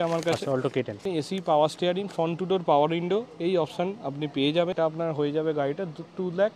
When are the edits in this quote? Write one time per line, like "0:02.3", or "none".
0:01.0
0:04.7